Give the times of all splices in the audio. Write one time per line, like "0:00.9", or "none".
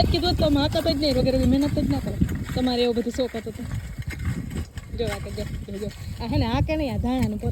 none